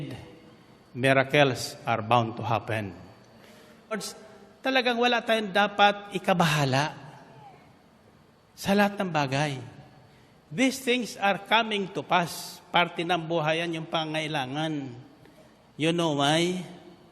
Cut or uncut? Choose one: cut